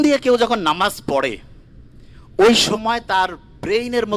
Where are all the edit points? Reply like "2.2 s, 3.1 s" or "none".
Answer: none